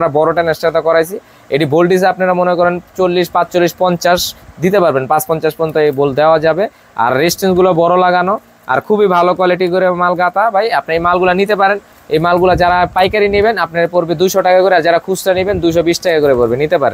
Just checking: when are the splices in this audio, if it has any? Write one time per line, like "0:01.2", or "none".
none